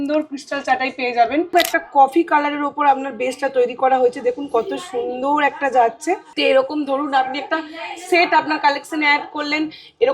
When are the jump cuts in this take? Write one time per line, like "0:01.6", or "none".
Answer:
0:01.5
0:06.3